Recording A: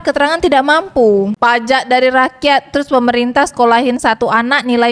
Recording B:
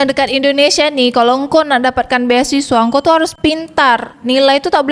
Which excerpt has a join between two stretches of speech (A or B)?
A